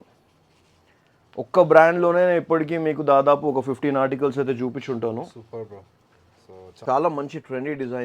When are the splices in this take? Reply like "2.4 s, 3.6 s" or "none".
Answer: 6.8 s